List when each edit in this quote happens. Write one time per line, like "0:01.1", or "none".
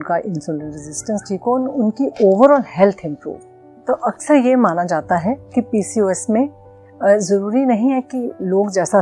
none